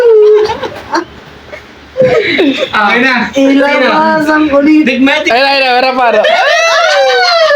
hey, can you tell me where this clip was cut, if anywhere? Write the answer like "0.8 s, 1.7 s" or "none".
6.3 s